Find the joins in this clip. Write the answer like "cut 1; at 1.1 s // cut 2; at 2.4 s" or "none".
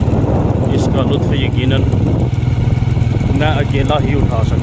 none